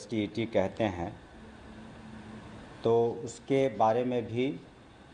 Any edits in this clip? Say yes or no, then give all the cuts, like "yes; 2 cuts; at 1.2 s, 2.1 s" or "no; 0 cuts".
no; 0 cuts